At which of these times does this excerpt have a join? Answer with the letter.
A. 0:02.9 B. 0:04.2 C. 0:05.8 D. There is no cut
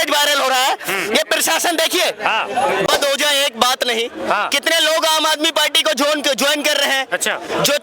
A